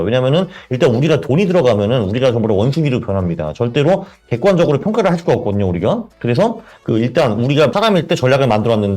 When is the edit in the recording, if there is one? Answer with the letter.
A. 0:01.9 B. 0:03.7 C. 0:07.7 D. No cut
C